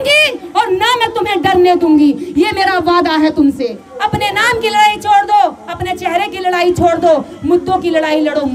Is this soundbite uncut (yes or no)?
no